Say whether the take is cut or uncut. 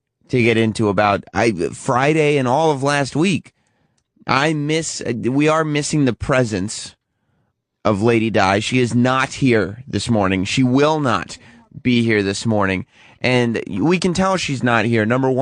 cut